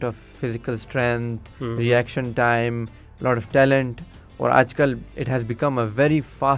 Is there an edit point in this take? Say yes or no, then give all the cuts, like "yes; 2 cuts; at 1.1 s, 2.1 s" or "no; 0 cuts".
yes; 1 cut; at 5.1 s